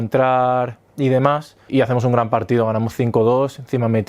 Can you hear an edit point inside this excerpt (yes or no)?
yes